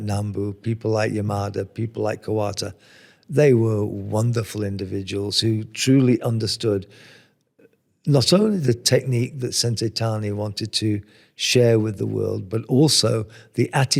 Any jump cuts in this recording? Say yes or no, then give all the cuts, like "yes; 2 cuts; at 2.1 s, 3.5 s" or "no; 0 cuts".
no; 0 cuts